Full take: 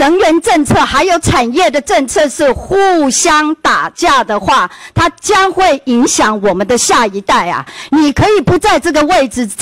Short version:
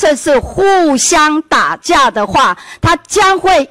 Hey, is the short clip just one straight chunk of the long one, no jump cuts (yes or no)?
yes